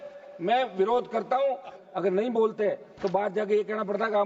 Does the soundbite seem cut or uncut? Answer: cut